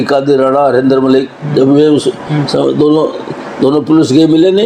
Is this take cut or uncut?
uncut